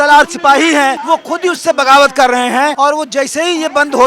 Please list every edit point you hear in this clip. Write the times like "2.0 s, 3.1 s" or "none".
1.0 s, 2.7 s